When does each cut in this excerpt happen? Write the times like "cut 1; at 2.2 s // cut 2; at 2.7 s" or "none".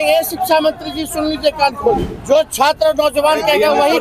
cut 1; at 2.1 s